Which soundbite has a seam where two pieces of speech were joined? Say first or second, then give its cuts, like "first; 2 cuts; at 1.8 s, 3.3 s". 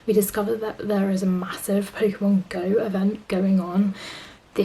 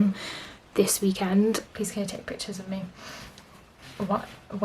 second; 1 cut; at 1.8 s